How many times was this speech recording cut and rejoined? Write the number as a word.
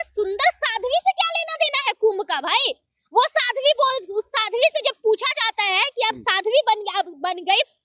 zero